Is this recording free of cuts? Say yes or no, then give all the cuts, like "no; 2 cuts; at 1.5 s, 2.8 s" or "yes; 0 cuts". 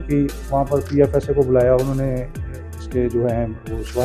yes; 0 cuts